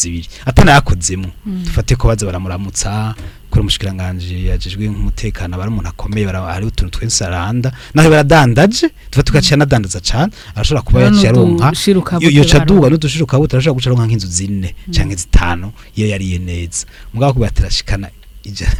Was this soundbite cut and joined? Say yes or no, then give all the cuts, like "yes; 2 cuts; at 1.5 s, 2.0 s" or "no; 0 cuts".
no; 0 cuts